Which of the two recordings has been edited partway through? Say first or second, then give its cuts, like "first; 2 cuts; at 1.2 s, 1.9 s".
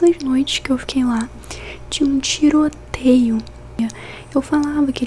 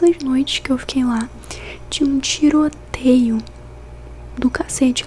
first; 1 cut; at 3.8 s